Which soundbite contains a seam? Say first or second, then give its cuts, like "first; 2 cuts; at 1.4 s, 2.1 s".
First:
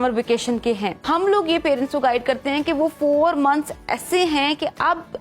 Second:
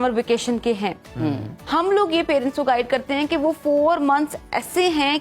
first; 1 cut; at 1.0 s